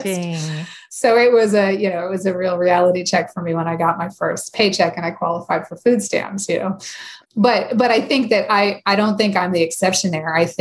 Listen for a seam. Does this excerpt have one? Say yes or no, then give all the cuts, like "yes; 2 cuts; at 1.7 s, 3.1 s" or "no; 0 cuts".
yes; 1 cut; at 7.1 s